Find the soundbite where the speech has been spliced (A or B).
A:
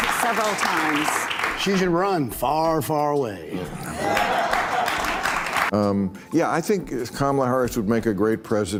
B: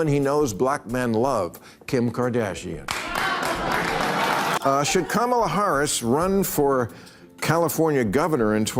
B